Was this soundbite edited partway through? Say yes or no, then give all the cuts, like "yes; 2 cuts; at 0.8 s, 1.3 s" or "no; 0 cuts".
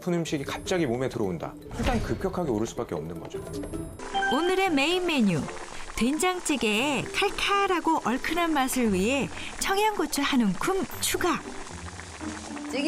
yes; 1 cut; at 4.0 s